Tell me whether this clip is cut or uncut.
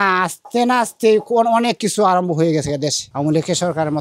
cut